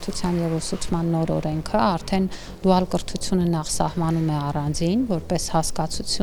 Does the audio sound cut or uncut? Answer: uncut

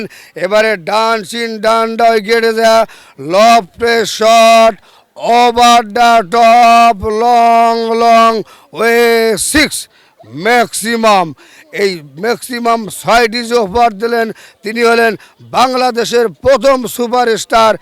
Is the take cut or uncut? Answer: uncut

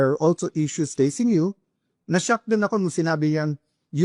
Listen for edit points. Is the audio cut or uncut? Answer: cut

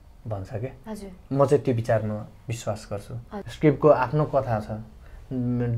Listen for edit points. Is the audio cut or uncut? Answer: cut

